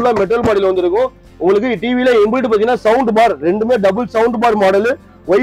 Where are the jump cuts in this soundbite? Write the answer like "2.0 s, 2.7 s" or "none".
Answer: none